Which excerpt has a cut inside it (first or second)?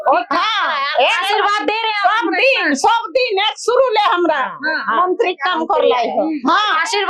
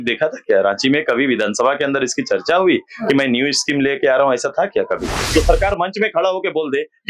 second